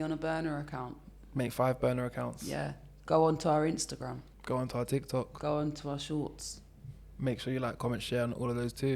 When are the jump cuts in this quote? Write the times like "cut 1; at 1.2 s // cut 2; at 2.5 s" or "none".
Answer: cut 1; at 4.3 s

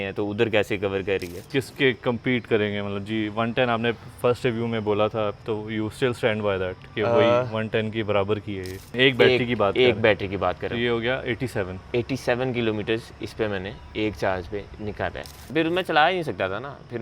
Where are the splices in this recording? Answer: cut 1; at 1.4 s // cut 2; at 5.4 s // cut 3; at 8.9 s // cut 4; at 15.5 s

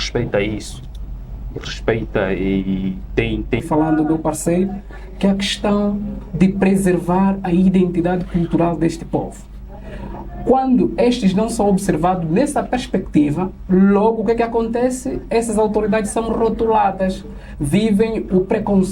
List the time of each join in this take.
cut 1; at 3.6 s

